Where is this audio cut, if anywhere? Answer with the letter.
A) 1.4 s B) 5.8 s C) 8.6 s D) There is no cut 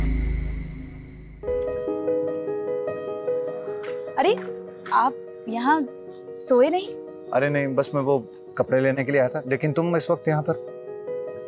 A